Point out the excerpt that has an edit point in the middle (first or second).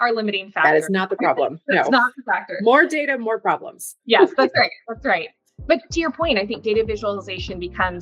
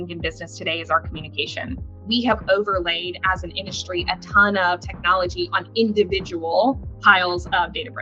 second